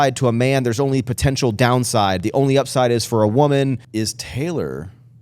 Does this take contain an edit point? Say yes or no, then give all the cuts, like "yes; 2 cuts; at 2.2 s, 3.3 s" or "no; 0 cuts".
yes; 1 cut; at 3.8 s